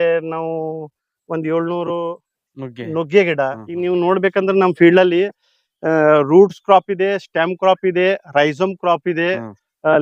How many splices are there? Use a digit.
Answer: 1